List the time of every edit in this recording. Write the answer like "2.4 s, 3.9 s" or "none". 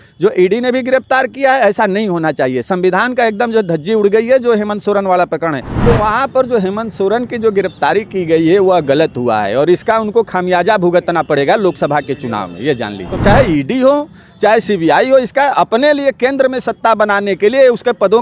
5.7 s, 13.1 s